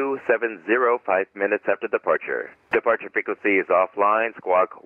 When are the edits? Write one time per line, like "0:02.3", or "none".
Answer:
0:02.6